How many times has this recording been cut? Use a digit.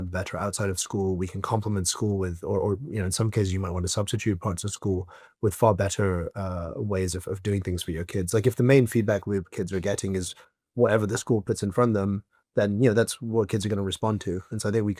0